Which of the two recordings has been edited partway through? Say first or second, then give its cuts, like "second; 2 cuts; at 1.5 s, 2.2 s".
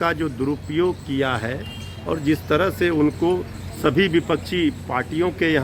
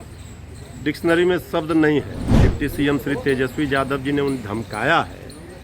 second; 1 cut; at 2.2 s